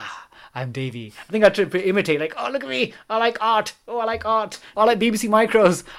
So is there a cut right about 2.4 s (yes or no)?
no